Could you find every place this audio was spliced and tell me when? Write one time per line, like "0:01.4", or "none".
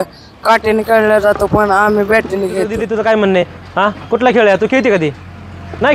0:02.8